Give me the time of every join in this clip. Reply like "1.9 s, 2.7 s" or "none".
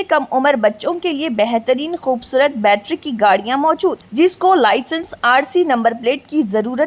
none